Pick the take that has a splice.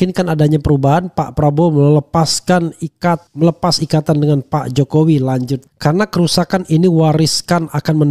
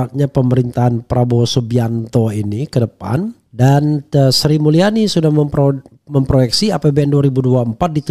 first; 1 cut; at 5.6 s

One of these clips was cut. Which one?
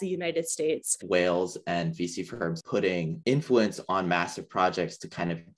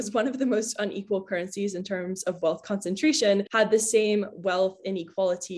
first; 2 cuts; at 1.0 s, 2.6 s

